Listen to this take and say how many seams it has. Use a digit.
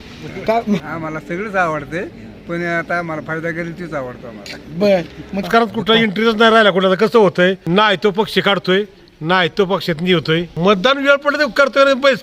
4